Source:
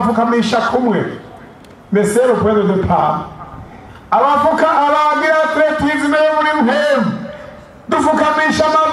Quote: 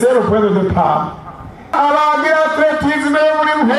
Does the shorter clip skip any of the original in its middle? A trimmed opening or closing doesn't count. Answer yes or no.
yes